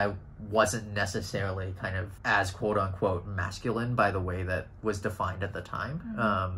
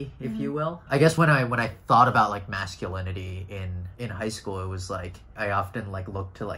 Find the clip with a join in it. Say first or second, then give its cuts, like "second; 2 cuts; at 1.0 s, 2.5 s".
second; 3 cuts; at 1.1 s, 3.8 s, 5.3 s